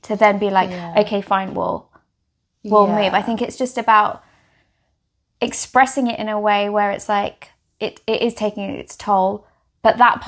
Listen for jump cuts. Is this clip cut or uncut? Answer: uncut